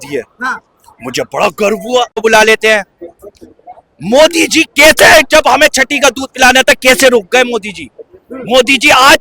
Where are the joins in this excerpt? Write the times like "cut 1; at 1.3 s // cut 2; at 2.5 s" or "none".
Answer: cut 1; at 2.2 s